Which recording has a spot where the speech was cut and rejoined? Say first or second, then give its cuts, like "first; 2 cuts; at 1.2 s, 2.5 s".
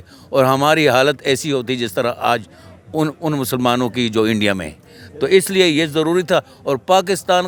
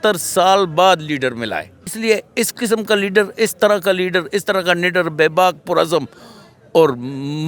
second; 1 cut; at 1.9 s